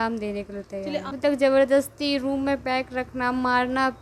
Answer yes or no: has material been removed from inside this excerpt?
yes